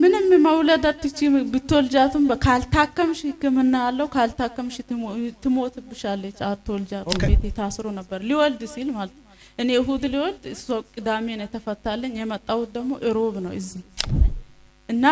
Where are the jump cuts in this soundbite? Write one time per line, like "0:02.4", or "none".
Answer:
0:07.3
0:14.2